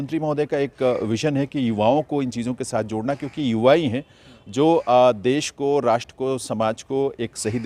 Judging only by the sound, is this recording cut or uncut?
uncut